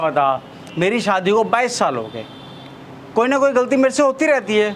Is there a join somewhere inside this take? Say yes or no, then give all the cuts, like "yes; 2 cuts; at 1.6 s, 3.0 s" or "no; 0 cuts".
no; 0 cuts